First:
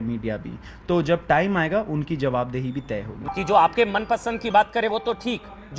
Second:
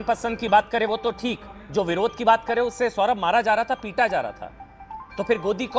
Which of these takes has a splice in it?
first; 1 cut; at 3.0 s

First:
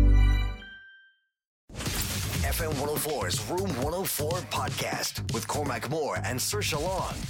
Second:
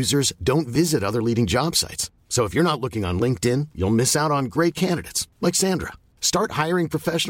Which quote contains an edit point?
first; 1 cut; at 1.7 s

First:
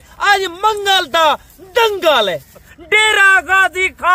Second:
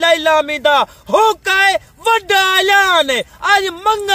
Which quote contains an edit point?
first; 1 cut; at 2.7 s

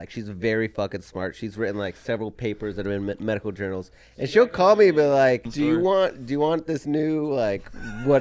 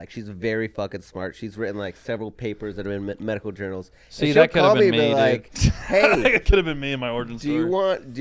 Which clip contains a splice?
first; 1 cut; at 5.5 s

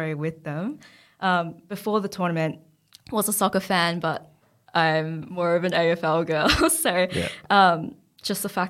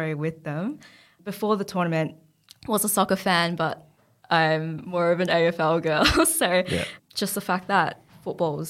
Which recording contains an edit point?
second; 2 cuts; at 1.1 s, 6.9 s

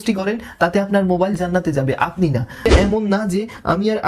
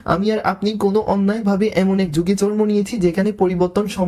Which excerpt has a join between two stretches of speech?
first; 1 cut; at 2.6 s

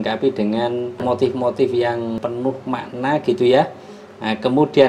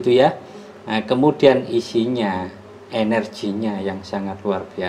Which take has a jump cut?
first; 2 cuts; at 1.0 s, 2.2 s

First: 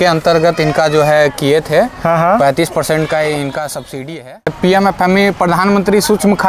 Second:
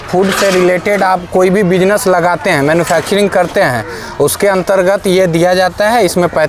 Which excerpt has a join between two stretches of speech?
first; 1 cut; at 4.5 s

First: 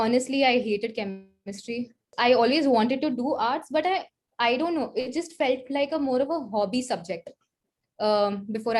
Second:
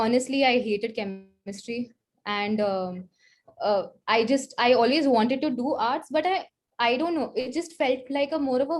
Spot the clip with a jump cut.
first; 1 cut; at 2.1 s

